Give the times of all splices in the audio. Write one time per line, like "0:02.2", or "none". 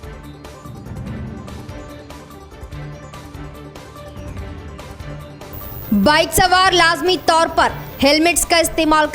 none